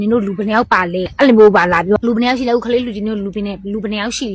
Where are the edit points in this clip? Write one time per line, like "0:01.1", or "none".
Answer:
0:01.1
0:02.0